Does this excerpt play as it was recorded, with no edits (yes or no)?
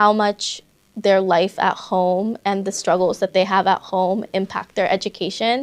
yes